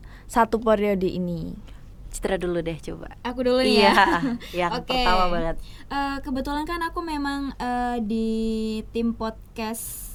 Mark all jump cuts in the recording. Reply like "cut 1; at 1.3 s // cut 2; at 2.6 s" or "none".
none